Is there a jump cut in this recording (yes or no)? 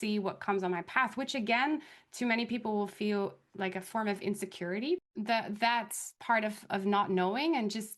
yes